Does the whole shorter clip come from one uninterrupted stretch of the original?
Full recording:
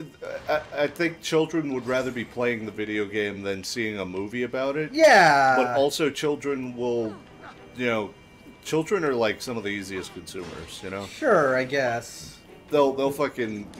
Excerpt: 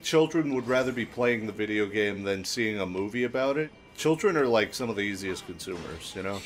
no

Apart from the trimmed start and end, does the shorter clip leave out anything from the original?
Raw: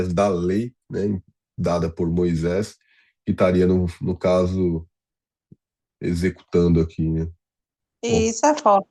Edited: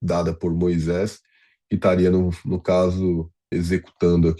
yes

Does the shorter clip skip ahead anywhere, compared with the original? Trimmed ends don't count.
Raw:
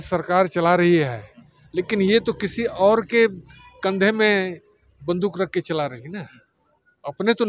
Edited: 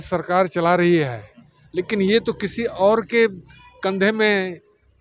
no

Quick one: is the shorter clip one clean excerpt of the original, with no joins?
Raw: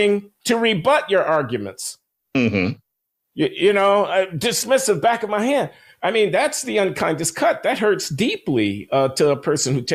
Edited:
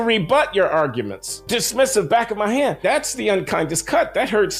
no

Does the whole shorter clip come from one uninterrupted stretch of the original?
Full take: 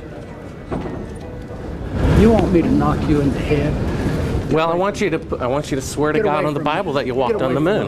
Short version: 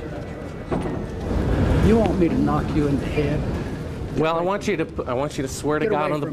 no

